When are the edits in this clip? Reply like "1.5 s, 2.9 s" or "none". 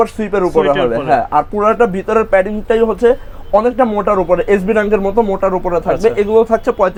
none